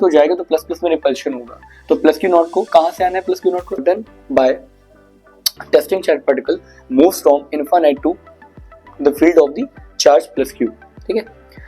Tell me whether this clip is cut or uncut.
cut